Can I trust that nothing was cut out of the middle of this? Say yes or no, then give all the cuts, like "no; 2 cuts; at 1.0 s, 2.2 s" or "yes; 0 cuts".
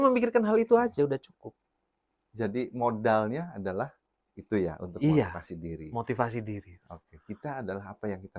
yes; 0 cuts